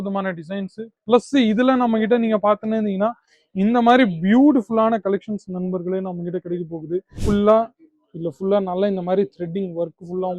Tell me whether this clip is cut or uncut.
cut